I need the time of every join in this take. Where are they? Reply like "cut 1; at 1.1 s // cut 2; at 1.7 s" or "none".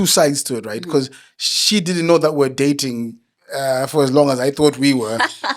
none

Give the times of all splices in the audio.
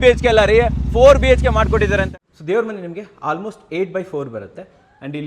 cut 1; at 2.1 s

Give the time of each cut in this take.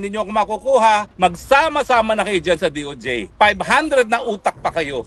cut 1; at 1.1 s

